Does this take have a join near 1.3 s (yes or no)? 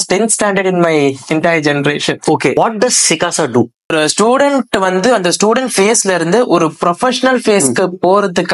no